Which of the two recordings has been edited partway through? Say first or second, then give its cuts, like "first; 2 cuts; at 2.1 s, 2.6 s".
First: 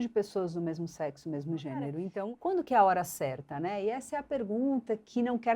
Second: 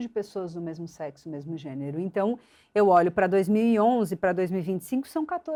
first; 1 cut; at 2.0 s